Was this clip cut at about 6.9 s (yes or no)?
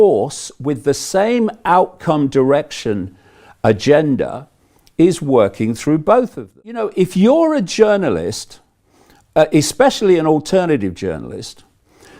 yes